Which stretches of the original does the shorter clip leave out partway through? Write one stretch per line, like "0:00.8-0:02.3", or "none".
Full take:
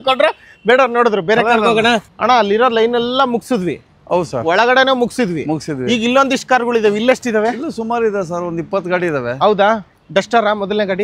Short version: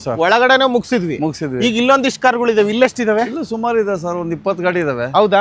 none